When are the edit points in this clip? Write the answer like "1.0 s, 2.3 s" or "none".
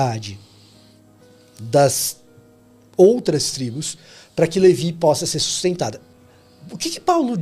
6.0 s